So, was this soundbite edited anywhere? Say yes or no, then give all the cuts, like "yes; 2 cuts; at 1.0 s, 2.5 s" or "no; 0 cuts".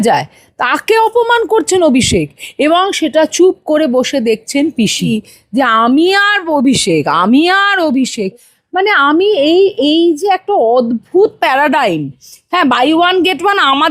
yes; 1 cut; at 5.1 s